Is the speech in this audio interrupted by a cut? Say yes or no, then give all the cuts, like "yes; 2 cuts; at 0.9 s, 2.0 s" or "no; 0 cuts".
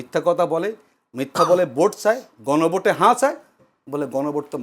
no; 0 cuts